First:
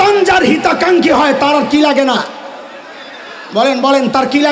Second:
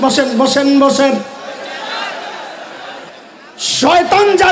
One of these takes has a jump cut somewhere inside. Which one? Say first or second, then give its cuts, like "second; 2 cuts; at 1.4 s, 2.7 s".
second; 1 cut; at 3.1 s